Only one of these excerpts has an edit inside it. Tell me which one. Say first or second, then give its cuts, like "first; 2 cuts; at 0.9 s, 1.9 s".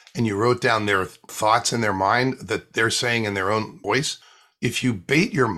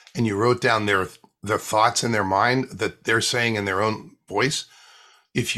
first; 2 cuts; at 1.3 s, 3.9 s